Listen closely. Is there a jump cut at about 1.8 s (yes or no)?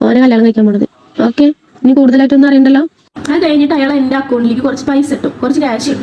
no